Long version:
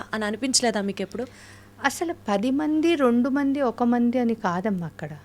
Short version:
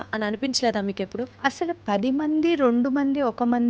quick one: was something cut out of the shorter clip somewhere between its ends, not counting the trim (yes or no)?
yes